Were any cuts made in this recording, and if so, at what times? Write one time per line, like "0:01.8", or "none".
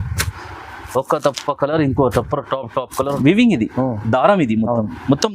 0:03.1